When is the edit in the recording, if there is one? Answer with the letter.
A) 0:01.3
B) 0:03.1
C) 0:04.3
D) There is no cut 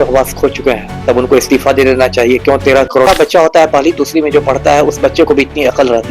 B